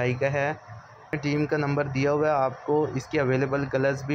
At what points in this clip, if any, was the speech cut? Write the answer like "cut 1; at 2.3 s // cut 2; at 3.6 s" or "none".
cut 1; at 1.2 s